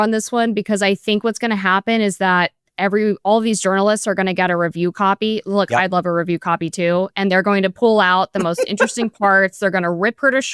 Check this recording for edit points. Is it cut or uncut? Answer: uncut